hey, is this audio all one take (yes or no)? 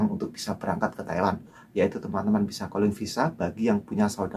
no